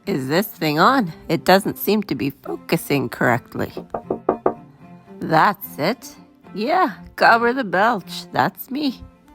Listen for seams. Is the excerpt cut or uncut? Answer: uncut